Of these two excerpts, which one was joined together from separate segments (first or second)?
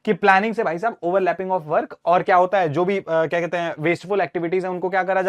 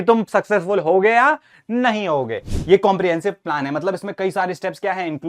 second